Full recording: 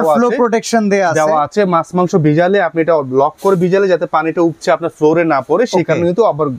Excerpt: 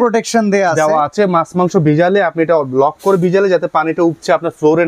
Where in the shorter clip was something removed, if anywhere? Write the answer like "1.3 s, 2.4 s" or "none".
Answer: none